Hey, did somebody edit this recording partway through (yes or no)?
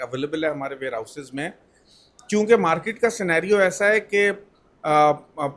no